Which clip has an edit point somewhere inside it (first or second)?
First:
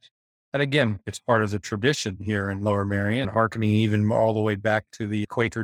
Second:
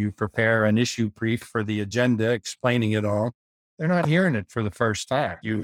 first